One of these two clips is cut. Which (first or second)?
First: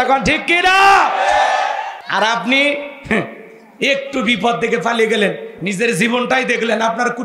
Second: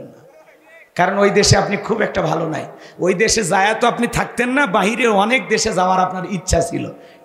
first